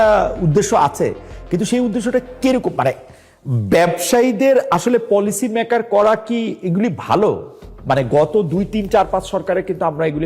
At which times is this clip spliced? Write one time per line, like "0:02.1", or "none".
none